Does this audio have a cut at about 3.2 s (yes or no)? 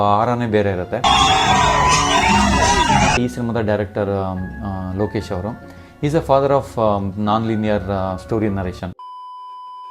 yes